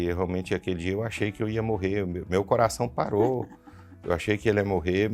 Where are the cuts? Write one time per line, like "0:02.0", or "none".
none